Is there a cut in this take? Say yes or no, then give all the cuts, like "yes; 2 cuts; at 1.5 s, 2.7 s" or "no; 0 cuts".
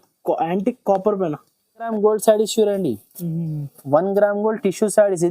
yes; 1 cut; at 1.9 s